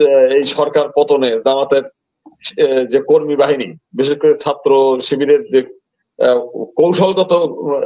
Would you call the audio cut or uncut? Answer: uncut